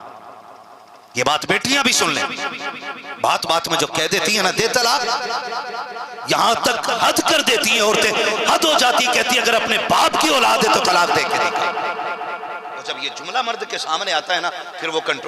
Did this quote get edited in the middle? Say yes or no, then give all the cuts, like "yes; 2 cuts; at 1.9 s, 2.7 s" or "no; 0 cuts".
yes; 1 cut; at 0.9 s